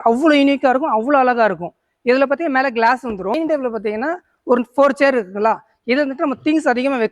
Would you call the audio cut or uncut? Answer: cut